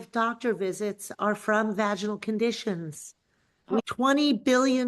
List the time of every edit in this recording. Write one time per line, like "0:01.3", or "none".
0:03.8